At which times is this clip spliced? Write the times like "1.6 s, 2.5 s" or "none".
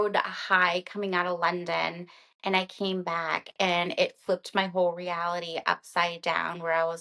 none